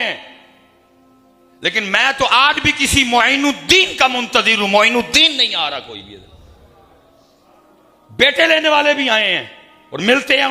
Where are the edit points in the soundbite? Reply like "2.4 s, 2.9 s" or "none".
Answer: none